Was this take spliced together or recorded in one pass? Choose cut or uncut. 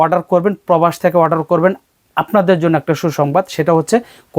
uncut